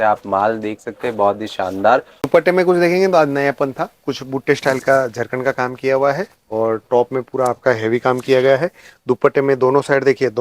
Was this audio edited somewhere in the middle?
yes; 1 cut; at 2.2 s

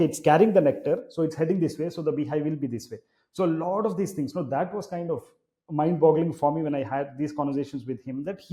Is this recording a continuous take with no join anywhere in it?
yes; 0 cuts

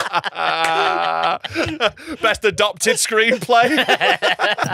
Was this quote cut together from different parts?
no; 0 cuts

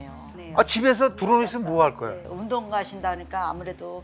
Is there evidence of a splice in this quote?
yes; 1 cut; at 2.1 s

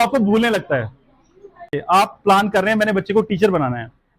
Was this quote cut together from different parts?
yes; 1 cut; at 1.8 s

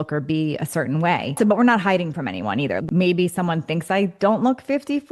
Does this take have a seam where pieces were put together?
yes; 2 cuts; at 1.4 s, 2.8 s

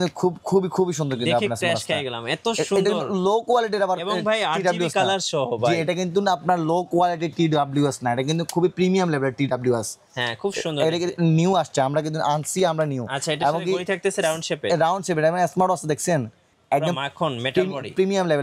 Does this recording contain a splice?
no; 0 cuts

